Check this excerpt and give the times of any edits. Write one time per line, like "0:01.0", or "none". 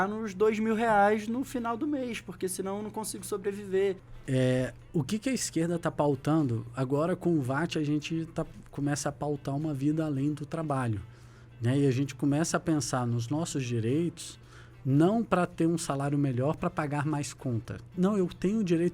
0:04.1
0:17.9